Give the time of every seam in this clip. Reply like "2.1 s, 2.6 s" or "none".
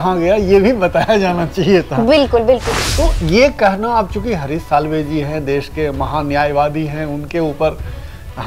2.8 s